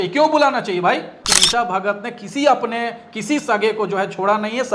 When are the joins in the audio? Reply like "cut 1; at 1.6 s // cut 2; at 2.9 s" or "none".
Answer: cut 1; at 1.2 s